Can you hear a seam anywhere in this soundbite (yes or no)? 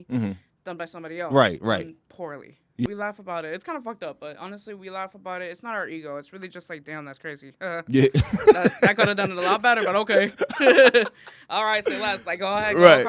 yes